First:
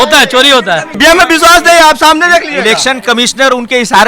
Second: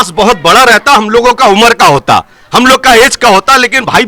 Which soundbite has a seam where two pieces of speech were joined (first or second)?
first